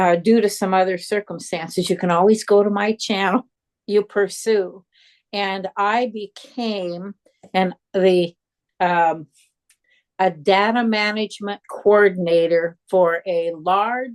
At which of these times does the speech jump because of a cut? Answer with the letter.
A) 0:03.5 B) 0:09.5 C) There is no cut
A